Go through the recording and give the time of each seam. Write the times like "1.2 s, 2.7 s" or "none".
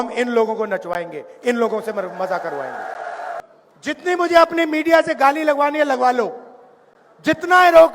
3.4 s